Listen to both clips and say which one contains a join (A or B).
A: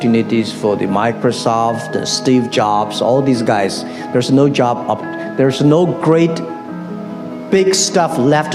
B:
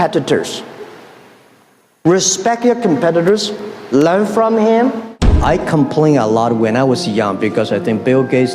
B